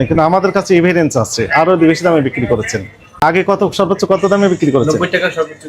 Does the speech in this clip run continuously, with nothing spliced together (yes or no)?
no